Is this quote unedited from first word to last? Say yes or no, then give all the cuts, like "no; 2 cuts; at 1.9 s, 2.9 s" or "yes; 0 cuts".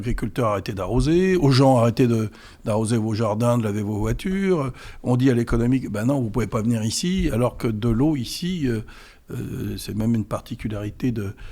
yes; 0 cuts